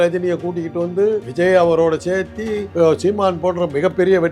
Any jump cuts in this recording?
yes; 2 cuts; at 1.3 s, 2.6 s

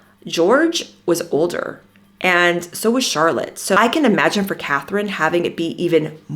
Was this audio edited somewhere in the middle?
yes; 1 cut; at 3.7 s

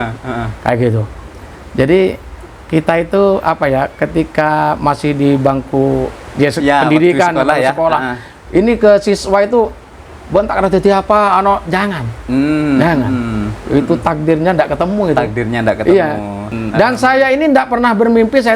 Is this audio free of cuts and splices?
no; 1 cut; at 16.6 s

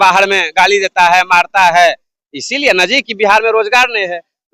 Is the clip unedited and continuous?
yes; 0 cuts

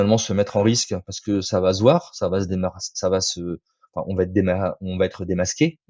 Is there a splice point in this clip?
no; 0 cuts

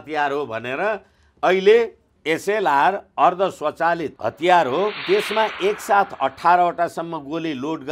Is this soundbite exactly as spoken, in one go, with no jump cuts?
no; 3 cuts; at 2.1 s, 4.1 s, 5.0 s

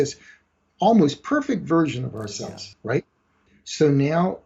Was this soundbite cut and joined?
yes; 1 cut; at 3.4 s

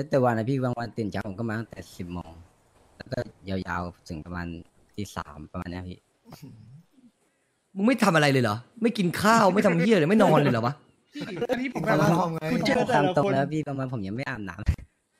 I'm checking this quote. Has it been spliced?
no; 0 cuts

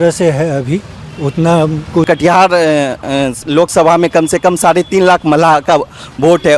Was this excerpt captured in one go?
no; 1 cut; at 2.1 s

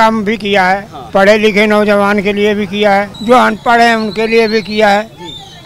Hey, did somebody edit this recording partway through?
yes; 2 cuts; at 0.9 s, 3.1 s

